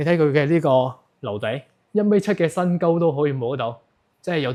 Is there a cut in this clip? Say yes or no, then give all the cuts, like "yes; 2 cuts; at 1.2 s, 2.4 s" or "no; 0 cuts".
no; 0 cuts